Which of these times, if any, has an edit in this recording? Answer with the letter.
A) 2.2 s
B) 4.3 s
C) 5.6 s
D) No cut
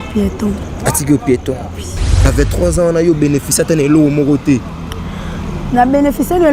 A